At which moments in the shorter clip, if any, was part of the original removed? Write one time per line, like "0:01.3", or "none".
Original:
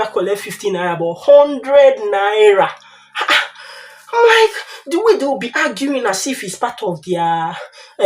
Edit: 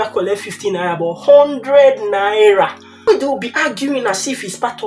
0:03.1